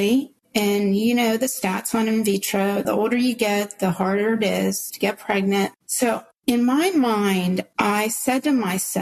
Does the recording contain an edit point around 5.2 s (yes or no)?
no